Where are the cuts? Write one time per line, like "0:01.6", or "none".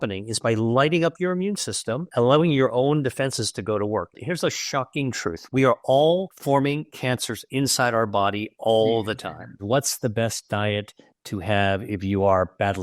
0:02.1
0:04.2
0:06.3
0:09.6